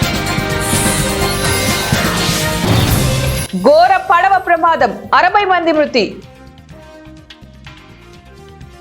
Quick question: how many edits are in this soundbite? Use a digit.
2